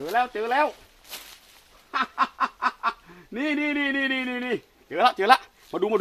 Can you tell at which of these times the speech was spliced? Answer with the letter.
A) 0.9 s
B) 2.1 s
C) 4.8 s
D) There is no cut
C